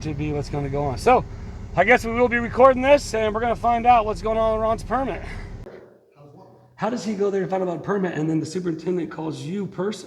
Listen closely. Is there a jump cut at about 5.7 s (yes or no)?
yes